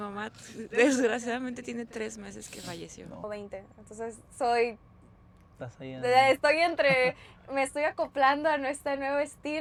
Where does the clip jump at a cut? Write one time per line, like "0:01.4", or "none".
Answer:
none

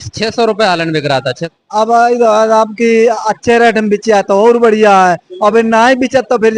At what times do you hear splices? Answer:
0:01.4

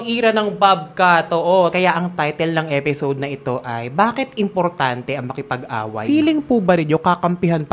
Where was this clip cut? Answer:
0:01.7
0:06.0

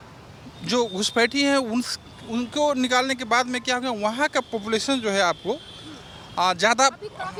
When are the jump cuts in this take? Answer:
none

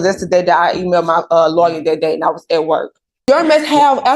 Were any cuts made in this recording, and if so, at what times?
0:03.1

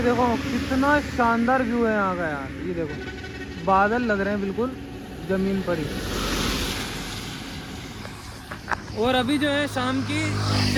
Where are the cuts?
none

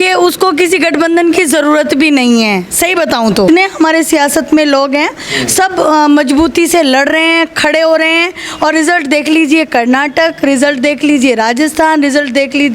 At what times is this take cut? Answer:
0:03.5

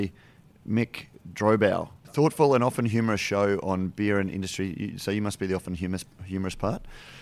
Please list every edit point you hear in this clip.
0:02.0

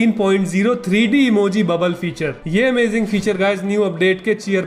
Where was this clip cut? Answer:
none

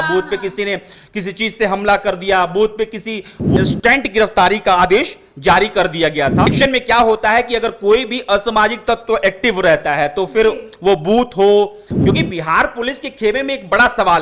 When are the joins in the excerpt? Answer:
0:03.6
0:06.5
0:11.9

